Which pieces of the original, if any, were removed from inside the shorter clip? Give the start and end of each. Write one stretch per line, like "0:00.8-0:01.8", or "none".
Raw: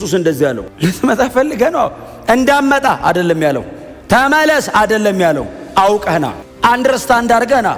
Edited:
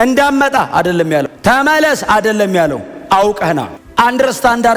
0:03.6-0:04.0